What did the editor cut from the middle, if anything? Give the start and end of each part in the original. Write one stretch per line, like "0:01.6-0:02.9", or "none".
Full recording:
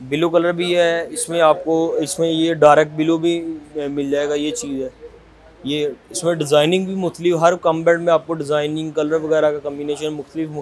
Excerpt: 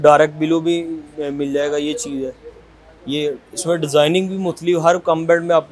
none